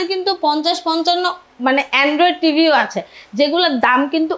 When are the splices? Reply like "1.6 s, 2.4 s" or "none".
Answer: none